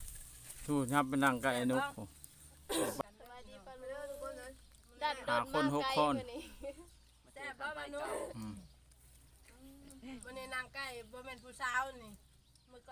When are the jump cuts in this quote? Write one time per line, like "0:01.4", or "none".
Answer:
0:03.0